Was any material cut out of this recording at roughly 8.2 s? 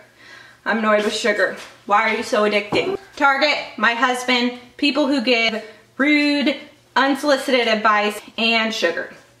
yes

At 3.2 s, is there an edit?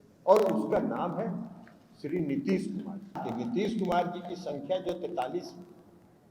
yes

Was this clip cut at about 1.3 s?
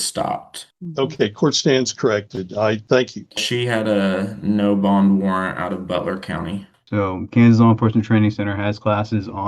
no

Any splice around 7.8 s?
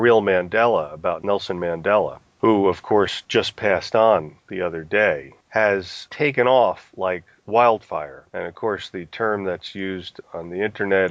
no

